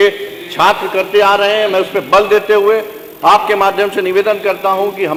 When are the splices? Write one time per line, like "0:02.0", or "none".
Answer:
none